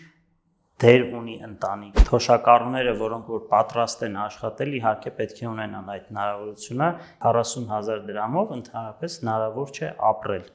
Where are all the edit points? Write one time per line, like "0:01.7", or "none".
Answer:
0:01.9
0:07.1